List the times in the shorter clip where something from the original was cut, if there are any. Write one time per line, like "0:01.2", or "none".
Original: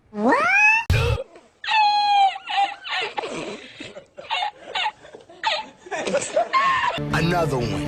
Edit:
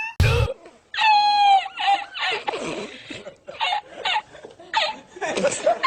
none